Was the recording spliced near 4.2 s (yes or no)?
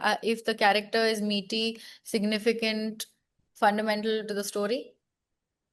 no